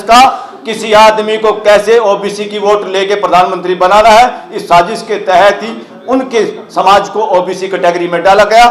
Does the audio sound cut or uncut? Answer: uncut